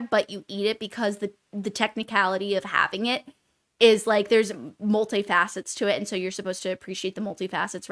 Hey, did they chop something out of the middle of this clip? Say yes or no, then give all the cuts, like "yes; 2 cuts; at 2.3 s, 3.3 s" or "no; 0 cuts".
no; 0 cuts